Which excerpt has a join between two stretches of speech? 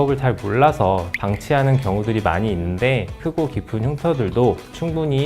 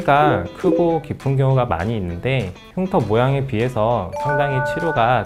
first; 2 cuts; at 1.1 s, 3.2 s

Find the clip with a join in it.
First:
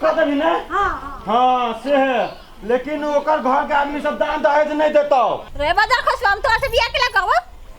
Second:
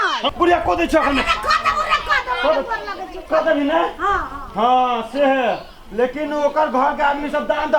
first; 1 cut; at 5.5 s

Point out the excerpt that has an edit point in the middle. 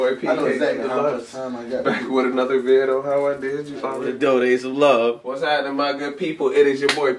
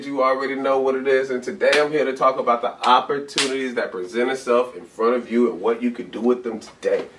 first; 1 cut; at 4.1 s

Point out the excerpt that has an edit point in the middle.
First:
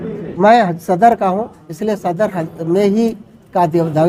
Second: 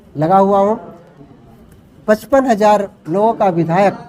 second; 1 cut; at 1.2 s

